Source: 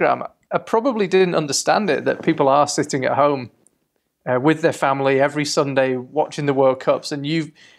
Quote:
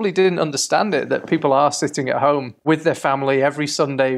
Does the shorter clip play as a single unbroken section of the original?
no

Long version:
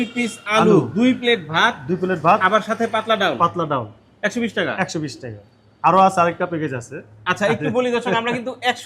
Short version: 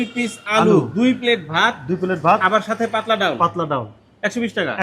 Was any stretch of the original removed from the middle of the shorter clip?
no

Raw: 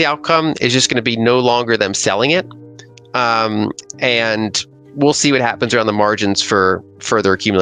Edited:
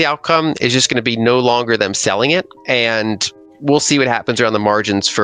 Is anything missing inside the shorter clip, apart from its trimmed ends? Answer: yes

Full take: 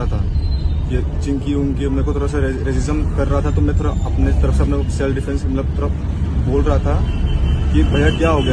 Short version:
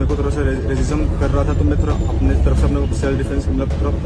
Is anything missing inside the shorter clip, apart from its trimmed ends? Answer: no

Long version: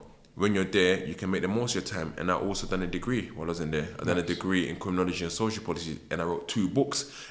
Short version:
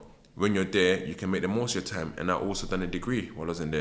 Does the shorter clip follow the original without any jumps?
yes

